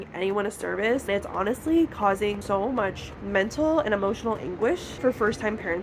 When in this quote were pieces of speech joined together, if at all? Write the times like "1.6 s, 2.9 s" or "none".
1.1 s, 2.4 s, 4.9 s